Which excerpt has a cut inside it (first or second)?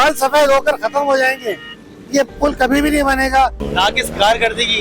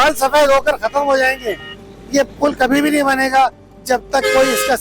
first